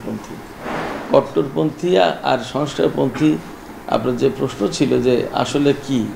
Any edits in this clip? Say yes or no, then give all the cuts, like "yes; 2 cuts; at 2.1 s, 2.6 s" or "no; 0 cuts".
no; 0 cuts